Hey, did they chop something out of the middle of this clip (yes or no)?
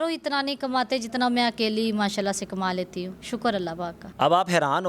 no